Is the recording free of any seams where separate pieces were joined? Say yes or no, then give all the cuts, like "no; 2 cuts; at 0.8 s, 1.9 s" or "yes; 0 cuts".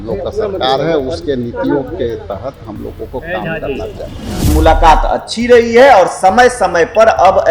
no; 1 cut; at 4.5 s